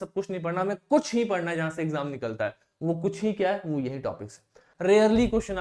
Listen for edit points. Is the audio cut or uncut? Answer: cut